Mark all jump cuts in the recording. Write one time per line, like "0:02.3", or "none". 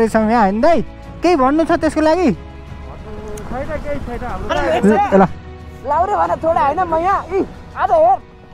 0:04.5